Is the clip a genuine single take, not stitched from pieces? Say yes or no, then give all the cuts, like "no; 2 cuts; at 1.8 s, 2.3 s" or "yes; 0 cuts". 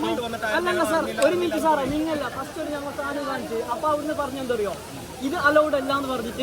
yes; 0 cuts